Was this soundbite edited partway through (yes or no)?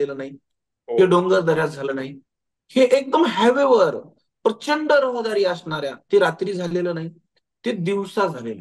no